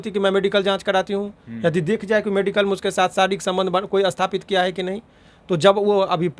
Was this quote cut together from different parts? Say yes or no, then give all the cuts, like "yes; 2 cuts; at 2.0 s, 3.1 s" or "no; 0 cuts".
no; 0 cuts